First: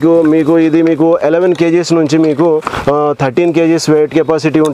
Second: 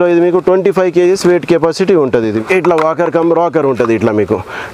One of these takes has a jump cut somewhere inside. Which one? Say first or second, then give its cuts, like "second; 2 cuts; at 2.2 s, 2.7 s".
second; 1 cut; at 2.4 s